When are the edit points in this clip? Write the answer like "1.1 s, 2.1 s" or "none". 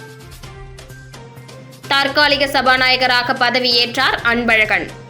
none